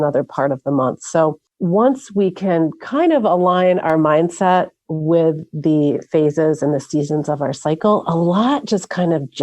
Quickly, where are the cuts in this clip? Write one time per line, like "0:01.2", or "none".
0:01.5